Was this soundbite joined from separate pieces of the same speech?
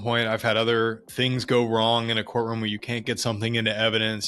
yes; 1 cut; at 1.1 s

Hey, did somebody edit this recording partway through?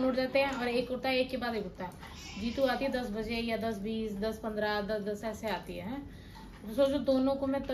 no; 0 cuts

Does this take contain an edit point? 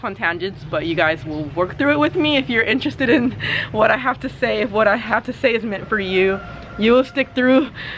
no; 0 cuts

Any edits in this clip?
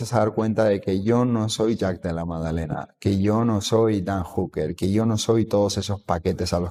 no; 0 cuts

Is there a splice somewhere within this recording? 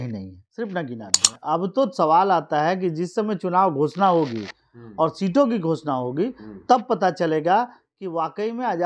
yes; 1 cut; at 1.3 s

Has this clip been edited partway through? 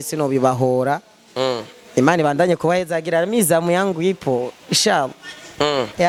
no; 0 cuts

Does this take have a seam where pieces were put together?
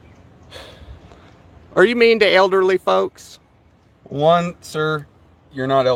no; 0 cuts

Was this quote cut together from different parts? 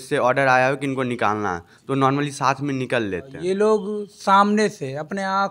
yes; 1 cut; at 3.3 s

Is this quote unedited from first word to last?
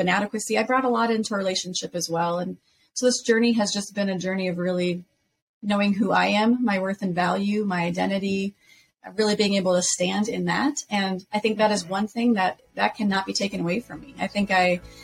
yes; 0 cuts

